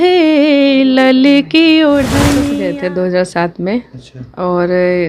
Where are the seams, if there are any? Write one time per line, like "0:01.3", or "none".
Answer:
0:02.4